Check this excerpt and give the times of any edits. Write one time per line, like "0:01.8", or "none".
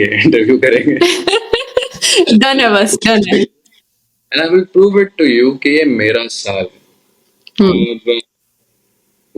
none